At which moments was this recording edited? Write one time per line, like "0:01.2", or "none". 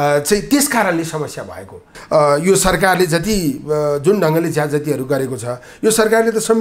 0:02.0